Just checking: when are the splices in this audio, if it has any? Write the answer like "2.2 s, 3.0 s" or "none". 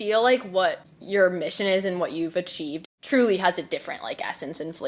0.9 s, 2.8 s